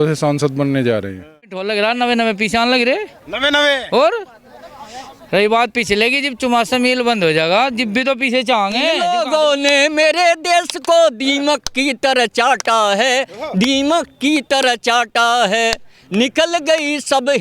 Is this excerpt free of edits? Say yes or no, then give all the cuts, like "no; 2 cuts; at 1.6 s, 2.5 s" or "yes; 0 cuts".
no; 2 cuts; at 1.6 s, 9.0 s